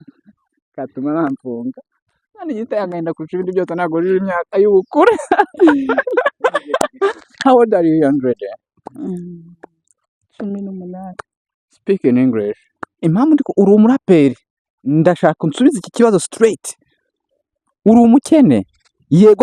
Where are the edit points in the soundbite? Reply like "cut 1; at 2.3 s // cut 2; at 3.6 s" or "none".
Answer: cut 1; at 13.0 s